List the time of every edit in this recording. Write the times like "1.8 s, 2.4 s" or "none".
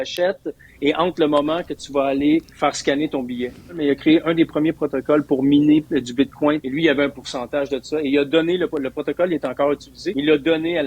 2.5 s, 3.8 s, 6.6 s, 10.0 s